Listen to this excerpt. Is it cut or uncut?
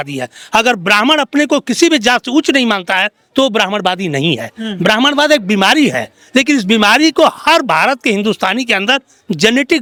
uncut